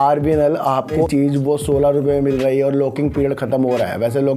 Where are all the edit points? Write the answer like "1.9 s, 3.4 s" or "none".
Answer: 0.9 s

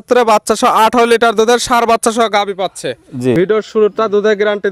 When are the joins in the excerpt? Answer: 3.4 s

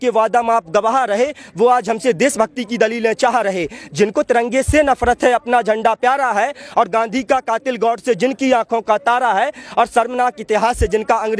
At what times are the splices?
none

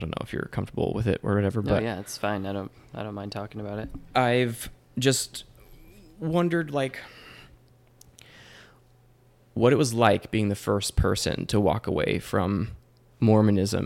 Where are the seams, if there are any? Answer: none

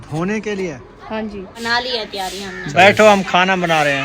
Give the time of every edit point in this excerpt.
1.6 s

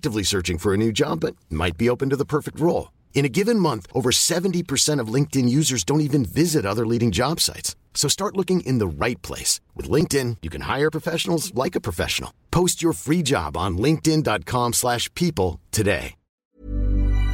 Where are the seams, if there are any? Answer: 16.4 s

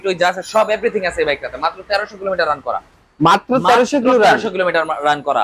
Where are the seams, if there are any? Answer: none

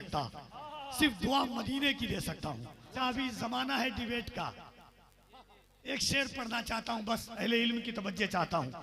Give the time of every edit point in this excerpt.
2.9 s

